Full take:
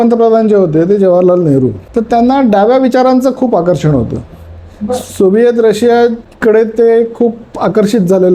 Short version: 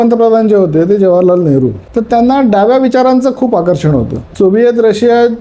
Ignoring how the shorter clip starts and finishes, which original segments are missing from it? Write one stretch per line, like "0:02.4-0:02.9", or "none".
0:04.3-0:05.1